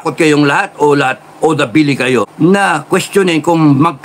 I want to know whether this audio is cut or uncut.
uncut